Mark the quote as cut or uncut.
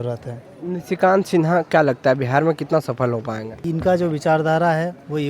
cut